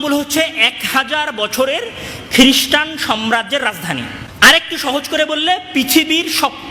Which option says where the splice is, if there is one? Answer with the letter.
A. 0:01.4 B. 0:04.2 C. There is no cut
B